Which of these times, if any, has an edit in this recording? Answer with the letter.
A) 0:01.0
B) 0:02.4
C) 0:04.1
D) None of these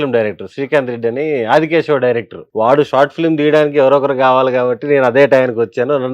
B